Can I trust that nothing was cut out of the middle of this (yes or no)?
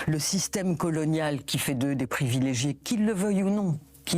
no